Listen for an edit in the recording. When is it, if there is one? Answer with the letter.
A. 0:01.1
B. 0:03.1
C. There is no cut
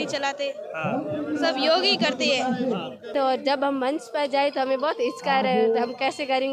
B